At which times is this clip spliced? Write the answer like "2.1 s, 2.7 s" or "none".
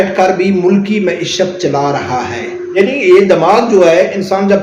2.6 s